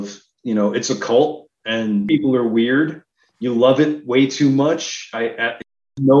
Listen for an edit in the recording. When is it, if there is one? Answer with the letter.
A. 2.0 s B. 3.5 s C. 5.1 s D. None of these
A